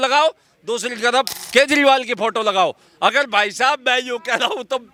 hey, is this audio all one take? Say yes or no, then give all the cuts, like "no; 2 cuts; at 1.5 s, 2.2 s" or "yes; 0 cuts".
yes; 0 cuts